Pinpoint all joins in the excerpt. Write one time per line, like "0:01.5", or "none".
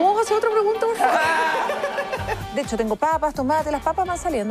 0:02.4